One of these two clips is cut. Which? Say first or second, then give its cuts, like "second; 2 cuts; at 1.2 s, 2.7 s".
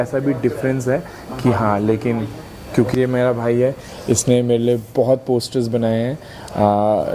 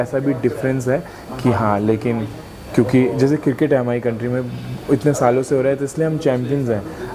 first; 1 cut; at 2.9 s